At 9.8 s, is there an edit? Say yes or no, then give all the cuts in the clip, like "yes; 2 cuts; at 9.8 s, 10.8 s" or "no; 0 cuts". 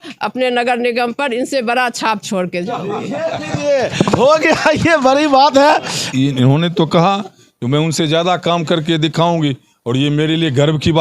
no; 1 cut; at 6.0 s